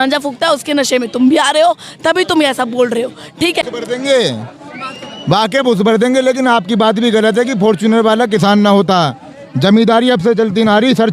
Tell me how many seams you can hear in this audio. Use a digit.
1